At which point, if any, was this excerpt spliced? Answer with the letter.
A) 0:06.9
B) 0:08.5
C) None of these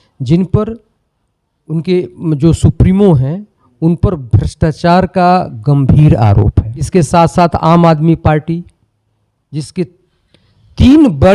A